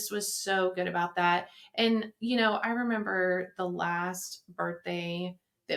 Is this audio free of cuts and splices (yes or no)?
yes